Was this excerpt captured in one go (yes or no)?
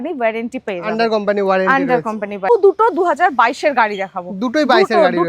no